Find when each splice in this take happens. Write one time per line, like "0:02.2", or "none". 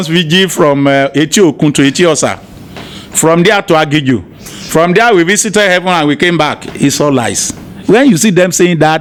none